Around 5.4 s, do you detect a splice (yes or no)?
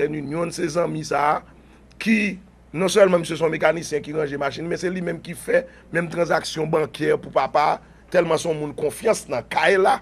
no